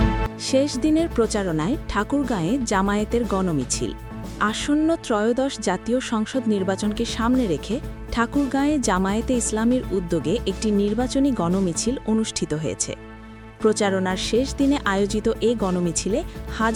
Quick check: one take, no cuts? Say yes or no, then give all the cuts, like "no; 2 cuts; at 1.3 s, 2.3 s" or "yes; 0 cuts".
yes; 0 cuts